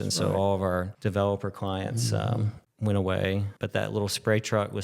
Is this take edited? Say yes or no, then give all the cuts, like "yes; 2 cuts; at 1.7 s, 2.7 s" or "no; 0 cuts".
yes; 3 cuts; at 0.9 s, 2.6 s, 3.5 s